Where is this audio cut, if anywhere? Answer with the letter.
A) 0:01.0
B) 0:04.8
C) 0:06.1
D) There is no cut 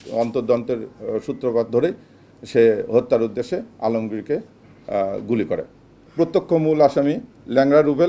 C